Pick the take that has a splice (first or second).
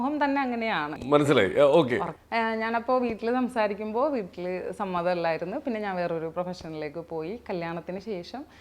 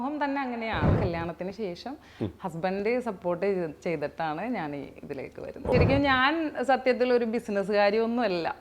second